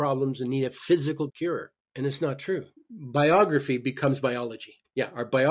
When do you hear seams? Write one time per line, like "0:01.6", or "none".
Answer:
0:02.8